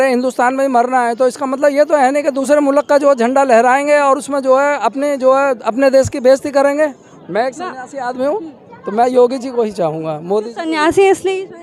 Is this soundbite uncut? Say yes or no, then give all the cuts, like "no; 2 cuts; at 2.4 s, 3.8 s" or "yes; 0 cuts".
no; 2 cuts; at 2.4 s, 7.1 s